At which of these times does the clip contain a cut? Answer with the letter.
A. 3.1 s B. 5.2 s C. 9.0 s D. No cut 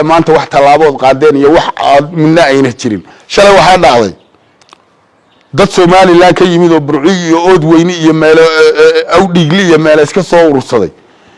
A